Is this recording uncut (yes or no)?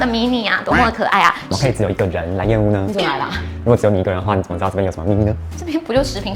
no